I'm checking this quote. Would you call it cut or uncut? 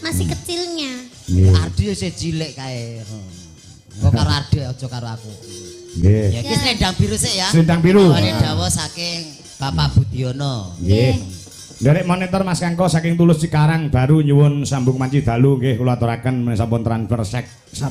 uncut